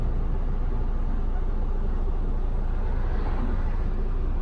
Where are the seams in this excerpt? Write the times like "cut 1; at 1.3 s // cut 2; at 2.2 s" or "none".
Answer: none